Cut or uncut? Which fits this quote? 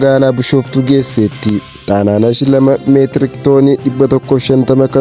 cut